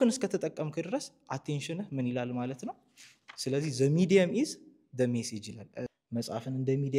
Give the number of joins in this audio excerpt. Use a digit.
1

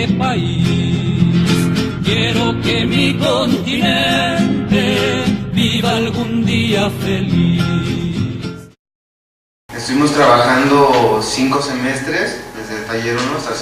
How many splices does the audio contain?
1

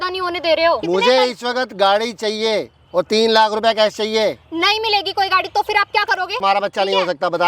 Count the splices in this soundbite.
2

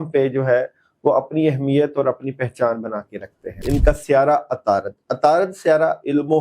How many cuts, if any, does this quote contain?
1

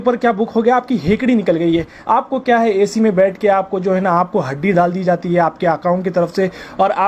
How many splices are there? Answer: 1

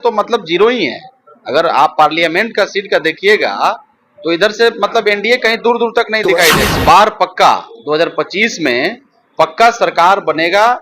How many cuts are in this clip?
1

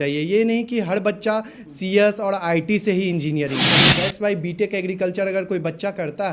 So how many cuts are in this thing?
1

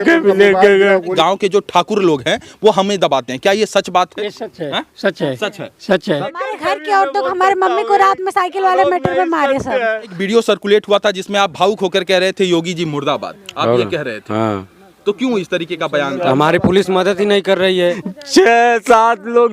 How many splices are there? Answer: 4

